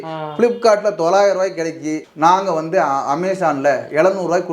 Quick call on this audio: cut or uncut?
cut